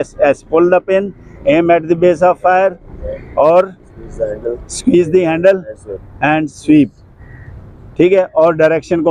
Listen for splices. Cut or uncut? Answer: uncut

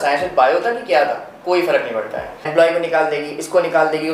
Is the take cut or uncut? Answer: cut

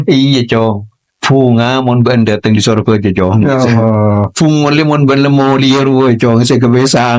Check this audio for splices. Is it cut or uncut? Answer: uncut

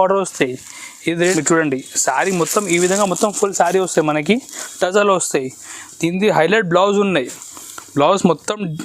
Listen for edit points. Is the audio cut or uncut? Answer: cut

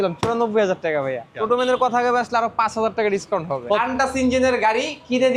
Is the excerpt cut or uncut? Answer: cut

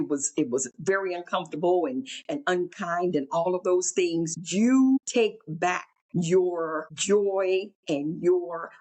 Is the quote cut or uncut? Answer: cut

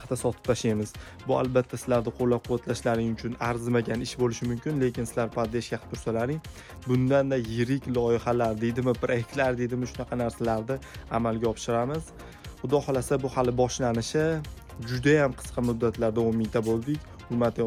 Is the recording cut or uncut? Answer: uncut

